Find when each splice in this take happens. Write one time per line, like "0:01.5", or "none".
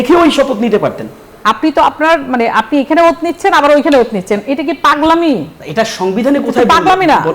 0:01.3